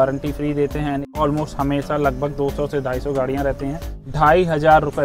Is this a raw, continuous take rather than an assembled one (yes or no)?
no